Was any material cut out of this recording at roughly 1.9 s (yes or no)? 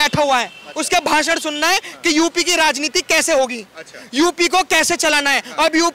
no